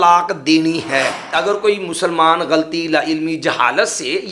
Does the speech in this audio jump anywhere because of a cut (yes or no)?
yes